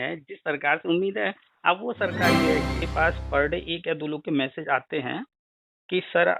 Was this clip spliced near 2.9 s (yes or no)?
yes